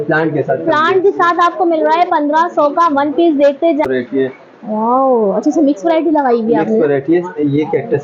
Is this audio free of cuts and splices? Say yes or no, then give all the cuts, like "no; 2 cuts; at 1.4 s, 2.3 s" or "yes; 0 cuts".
no; 1 cut; at 3.9 s